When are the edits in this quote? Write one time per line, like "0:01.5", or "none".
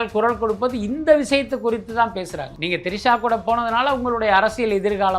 0:02.5